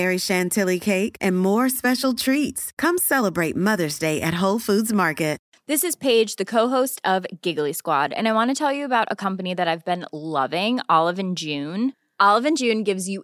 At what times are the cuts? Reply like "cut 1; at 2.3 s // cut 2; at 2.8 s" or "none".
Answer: cut 1; at 5.5 s